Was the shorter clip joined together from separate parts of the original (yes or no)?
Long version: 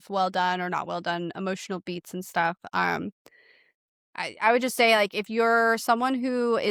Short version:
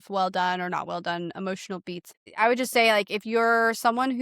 yes